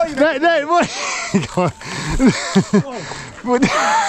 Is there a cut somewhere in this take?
no; 0 cuts

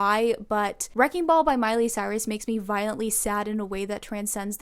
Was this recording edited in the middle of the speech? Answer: no; 0 cuts

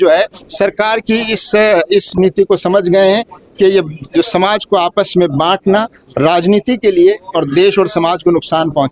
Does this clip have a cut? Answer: no; 0 cuts

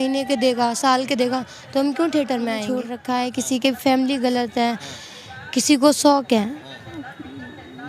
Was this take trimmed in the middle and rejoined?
yes; 1 cut; at 2.9 s

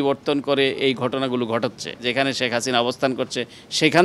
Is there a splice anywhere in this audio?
yes; 1 cut; at 2.1 s

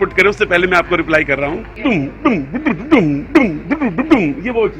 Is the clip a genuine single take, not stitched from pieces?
no; 1 cut; at 1.8 s

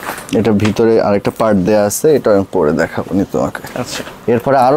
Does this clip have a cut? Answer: no; 0 cuts

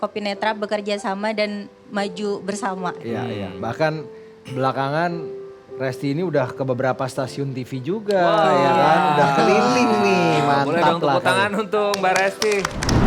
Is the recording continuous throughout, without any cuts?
no; 1 cut; at 3.0 s

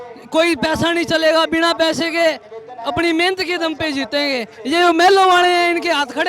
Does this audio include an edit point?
no; 0 cuts

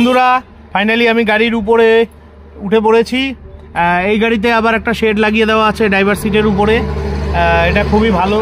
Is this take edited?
no; 0 cuts

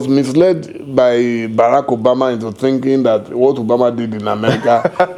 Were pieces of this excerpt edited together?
no; 0 cuts

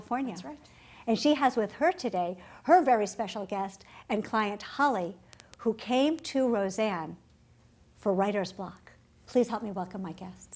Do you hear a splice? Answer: yes; 1 cut; at 5.8 s

